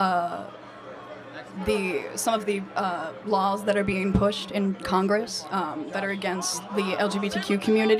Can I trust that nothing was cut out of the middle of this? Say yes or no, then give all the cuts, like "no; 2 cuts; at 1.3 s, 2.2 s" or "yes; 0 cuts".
yes; 0 cuts